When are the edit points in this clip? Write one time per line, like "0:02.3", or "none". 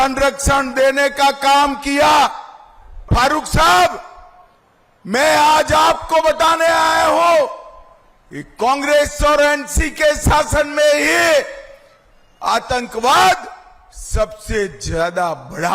0:03.0